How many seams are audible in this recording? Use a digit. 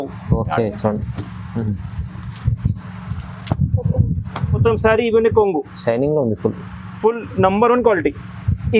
1